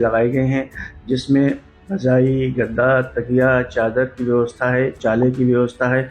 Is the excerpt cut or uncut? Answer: cut